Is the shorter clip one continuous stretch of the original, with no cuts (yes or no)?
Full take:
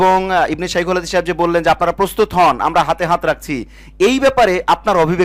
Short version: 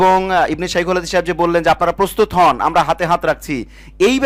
yes